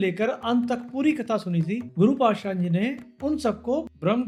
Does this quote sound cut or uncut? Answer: uncut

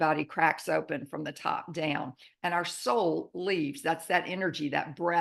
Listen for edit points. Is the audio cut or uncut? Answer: uncut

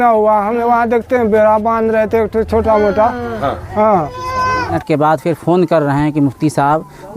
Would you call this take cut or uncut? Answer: cut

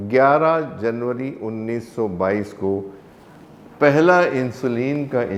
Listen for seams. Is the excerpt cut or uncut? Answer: uncut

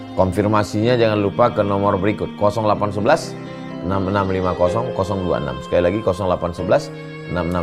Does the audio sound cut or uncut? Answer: uncut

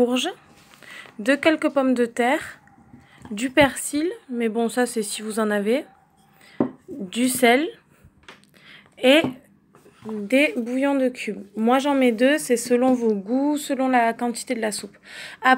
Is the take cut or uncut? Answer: uncut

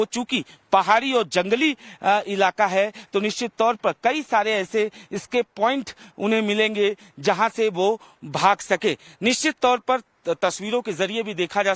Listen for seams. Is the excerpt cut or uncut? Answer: uncut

